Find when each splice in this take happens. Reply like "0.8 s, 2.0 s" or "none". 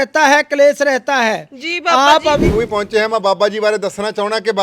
2.5 s